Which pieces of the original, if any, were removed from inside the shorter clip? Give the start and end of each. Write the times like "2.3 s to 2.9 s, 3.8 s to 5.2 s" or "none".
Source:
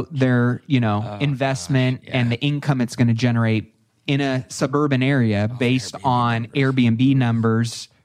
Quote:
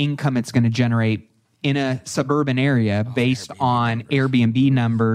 none